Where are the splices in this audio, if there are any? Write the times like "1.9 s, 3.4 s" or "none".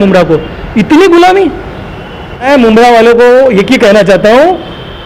2.5 s